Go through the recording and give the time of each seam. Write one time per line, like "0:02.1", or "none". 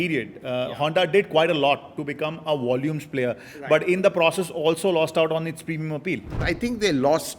0:06.4